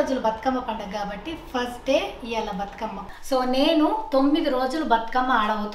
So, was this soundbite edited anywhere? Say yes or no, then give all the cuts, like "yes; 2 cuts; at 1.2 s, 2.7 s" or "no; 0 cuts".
yes; 1 cut; at 3.1 s